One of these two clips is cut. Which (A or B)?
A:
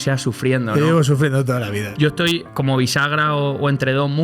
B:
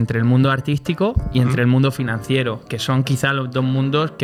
A